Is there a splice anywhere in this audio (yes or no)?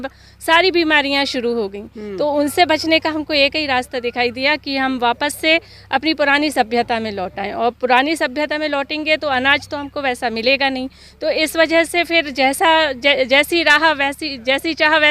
no